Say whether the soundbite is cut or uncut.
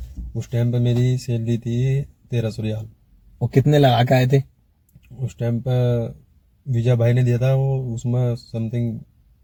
uncut